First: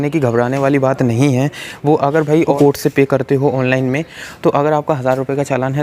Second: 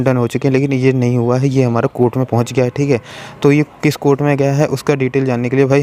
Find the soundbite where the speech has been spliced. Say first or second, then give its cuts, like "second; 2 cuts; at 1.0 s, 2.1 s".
first; 1 cut; at 2.5 s